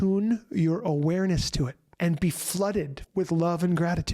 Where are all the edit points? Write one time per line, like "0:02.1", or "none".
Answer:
0:01.8
0:03.0